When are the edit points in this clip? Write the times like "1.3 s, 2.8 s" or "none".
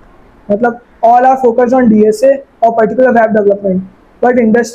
none